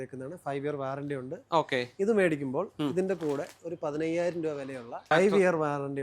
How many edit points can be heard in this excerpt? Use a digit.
1